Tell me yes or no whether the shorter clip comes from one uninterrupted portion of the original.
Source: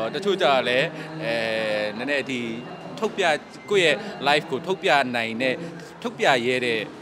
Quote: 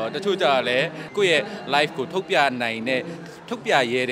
no